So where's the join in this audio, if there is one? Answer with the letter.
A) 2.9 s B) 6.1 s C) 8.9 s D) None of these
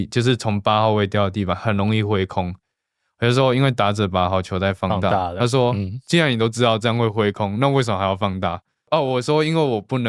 C